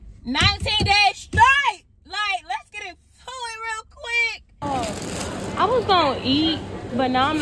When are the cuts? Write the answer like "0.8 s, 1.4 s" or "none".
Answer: 4.6 s

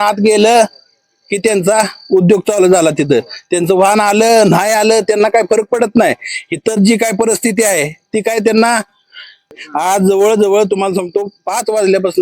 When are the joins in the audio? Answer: 9.6 s

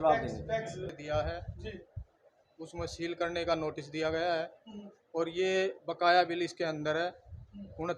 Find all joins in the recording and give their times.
0.9 s

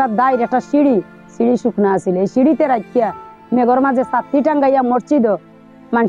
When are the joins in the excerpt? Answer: none

